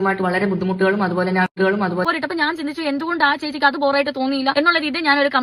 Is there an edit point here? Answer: yes; 1 cut; at 2.0 s

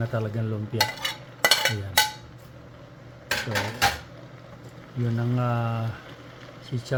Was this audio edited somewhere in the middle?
no; 0 cuts

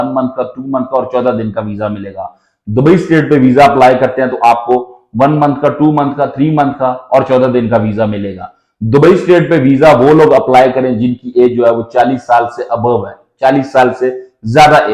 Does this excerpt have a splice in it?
no; 0 cuts

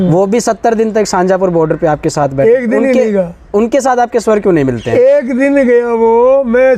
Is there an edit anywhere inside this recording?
no; 0 cuts

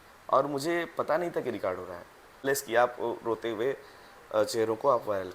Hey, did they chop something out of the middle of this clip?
yes; 1 cut; at 2.4 s

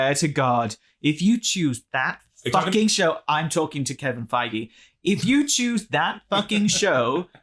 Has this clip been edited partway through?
no; 0 cuts

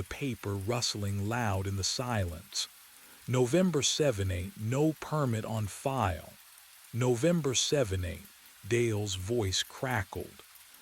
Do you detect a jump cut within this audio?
yes; 1 cut; at 5.0 s

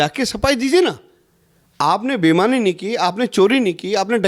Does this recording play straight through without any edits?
yes; 0 cuts

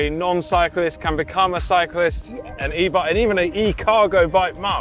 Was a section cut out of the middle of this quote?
no; 0 cuts

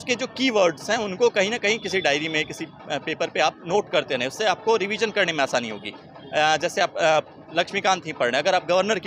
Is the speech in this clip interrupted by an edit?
no; 0 cuts

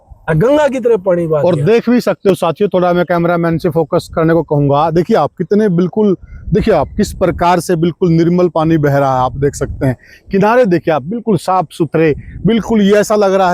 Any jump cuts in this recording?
no; 0 cuts

